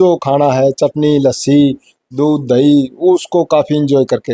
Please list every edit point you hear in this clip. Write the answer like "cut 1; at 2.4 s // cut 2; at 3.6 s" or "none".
none